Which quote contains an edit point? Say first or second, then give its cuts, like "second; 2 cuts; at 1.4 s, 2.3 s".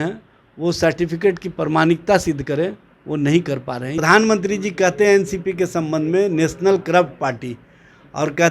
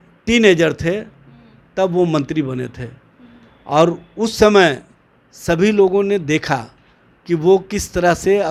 first; 1 cut; at 4.0 s